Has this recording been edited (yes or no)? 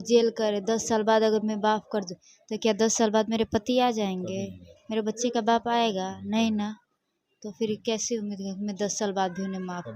no